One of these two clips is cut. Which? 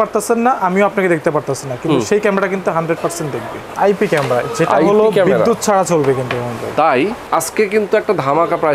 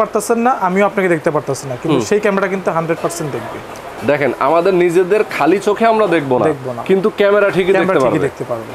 first; 2 cuts; at 3.7 s, 7.2 s

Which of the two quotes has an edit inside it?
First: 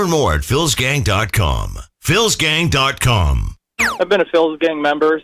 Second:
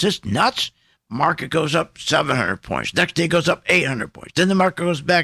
first; 1 cut; at 3.9 s

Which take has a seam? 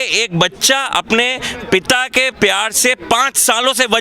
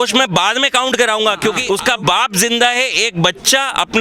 second; 1 cut; at 1.6 s

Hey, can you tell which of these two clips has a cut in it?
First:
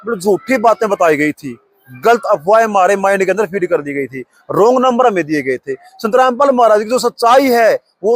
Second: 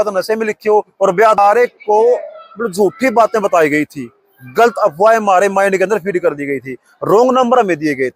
second; 1 cut; at 1.4 s

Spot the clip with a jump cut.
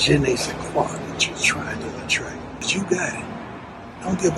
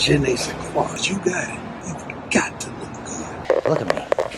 second; 3 cuts; at 1.0 s, 1.8 s, 3.4 s

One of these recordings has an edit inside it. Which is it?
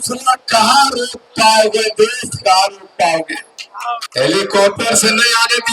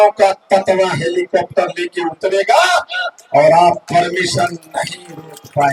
first; 1 cut; at 4.0 s

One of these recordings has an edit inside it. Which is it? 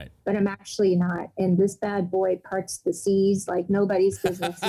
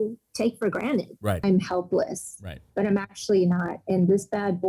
second; 1 cut; at 1.4 s

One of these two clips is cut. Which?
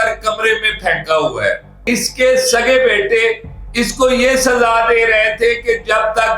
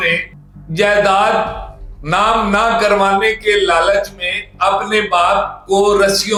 first; 1 cut; at 1.7 s

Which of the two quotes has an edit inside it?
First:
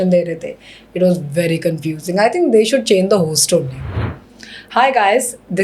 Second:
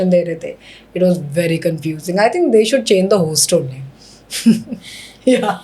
first; 1 cut; at 4.3 s

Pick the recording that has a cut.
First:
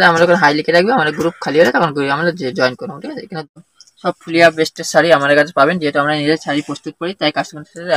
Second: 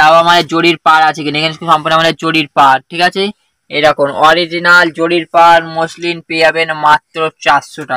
first; 1 cut; at 3.5 s

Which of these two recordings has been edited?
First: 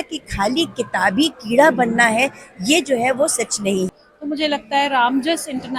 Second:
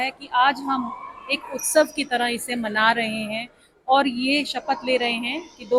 first; 1 cut; at 3.9 s

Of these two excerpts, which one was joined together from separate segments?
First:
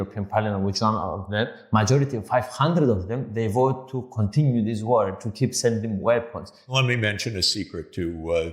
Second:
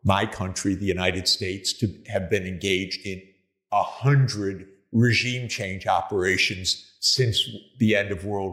first; 2 cuts; at 1.6 s, 6.7 s

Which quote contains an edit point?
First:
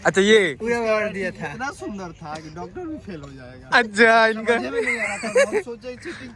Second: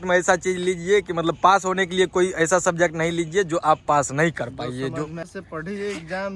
second; 1 cut; at 5.2 s

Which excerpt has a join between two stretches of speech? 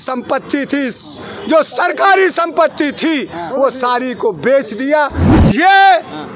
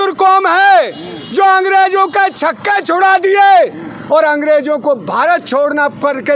first; 1 cut; at 5.2 s

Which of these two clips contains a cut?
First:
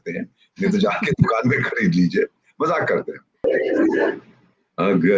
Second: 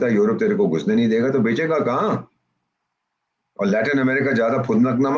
first; 1 cut; at 3.4 s

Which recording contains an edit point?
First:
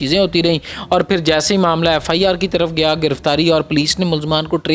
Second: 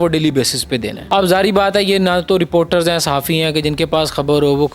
second; 1 cut; at 0.9 s

